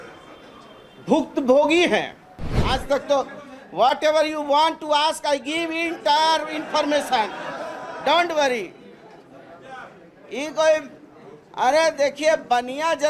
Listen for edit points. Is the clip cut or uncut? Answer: cut